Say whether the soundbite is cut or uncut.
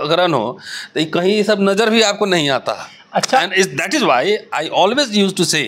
uncut